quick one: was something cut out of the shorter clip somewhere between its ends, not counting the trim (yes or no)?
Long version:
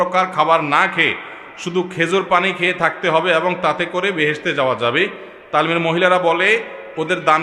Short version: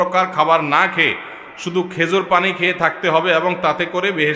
no